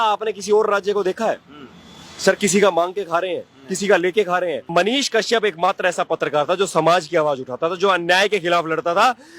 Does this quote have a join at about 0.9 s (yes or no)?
no